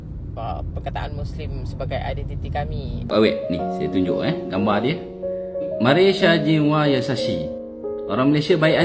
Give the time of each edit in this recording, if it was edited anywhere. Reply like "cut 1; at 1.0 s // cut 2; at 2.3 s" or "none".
cut 1; at 3.0 s